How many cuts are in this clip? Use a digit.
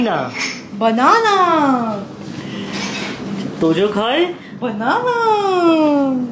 0